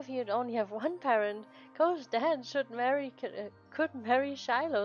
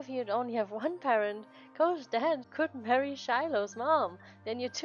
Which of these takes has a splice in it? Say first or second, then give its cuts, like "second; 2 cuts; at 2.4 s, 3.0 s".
second; 1 cut; at 2.5 s